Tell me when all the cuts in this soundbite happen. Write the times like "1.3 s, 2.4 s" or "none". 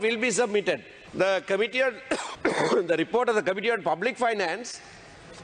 1.0 s, 2.3 s